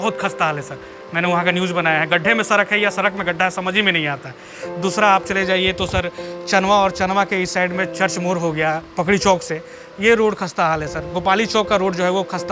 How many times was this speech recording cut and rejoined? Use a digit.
0